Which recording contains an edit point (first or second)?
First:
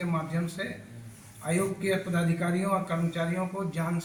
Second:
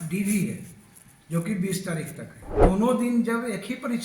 second